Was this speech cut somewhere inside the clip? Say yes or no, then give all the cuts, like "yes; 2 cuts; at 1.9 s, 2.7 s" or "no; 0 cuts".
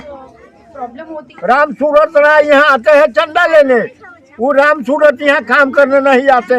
yes; 1 cut; at 1.4 s